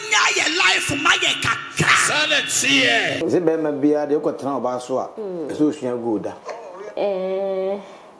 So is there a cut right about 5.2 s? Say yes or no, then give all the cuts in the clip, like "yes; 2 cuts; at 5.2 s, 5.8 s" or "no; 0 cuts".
no; 1 cut; at 3.2 s